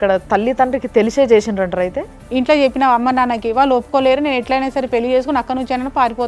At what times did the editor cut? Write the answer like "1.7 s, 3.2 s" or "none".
2.1 s